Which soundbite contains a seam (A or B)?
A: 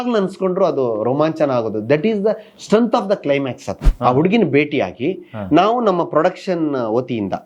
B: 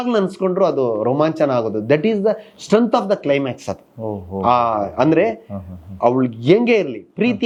A